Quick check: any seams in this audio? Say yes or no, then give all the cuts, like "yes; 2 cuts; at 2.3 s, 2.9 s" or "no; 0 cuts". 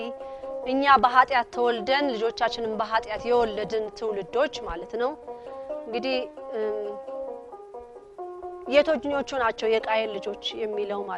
no; 0 cuts